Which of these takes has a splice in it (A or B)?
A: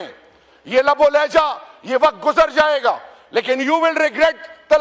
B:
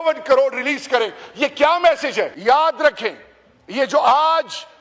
B